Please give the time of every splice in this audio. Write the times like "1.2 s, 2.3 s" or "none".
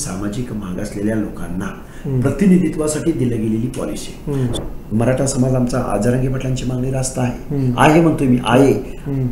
4.5 s